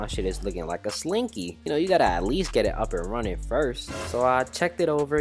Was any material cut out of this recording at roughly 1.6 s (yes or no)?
yes